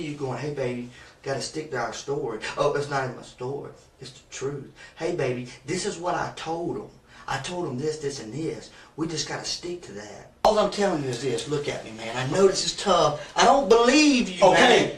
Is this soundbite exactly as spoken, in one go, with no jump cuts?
no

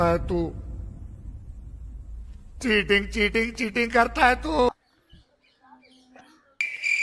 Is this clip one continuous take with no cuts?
yes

